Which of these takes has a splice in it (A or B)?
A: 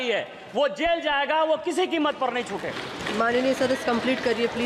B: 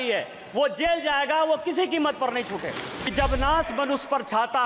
B